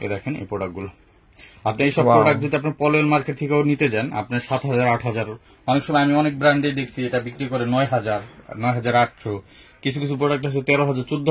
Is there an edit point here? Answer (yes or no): no